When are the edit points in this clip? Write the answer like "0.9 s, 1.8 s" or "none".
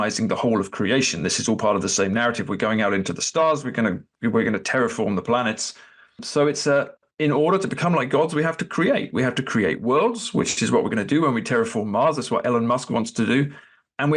6.2 s, 7.0 s